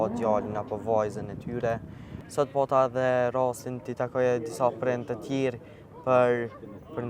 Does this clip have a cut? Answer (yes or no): yes